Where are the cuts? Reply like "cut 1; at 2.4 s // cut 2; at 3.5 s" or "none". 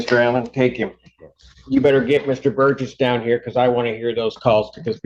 none